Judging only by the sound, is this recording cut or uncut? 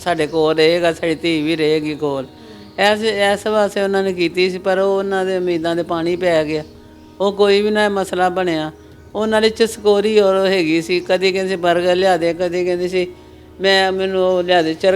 uncut